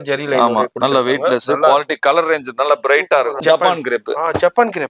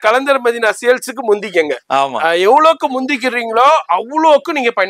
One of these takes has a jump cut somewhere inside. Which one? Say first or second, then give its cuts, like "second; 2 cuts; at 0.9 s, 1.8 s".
first; 1 cut; at 3.4 s